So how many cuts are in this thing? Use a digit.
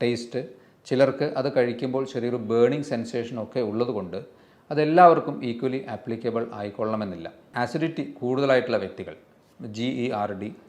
1